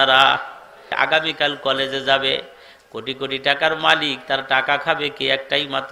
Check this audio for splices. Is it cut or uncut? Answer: cut